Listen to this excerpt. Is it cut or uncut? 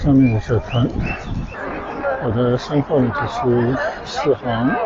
cut